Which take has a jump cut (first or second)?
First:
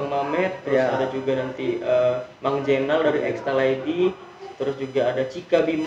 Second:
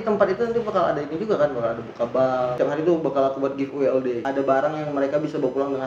second